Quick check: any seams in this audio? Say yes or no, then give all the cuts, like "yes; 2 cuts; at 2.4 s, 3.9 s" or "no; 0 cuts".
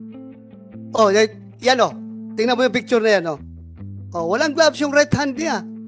yes; 1 cut; at 0.9 s